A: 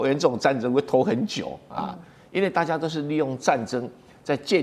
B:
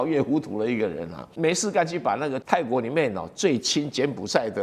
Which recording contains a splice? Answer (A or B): B